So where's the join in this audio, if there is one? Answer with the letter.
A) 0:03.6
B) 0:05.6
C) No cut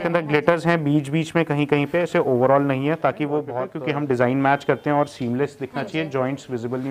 A